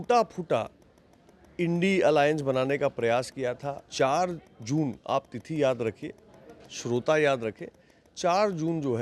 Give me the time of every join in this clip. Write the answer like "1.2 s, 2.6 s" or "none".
3.9 s